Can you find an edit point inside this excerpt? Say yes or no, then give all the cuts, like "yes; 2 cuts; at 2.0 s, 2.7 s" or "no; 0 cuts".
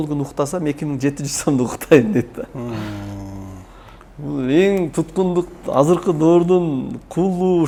no; 0 cuts